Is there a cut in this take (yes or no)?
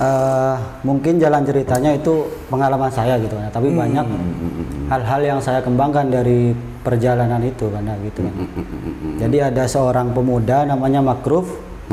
no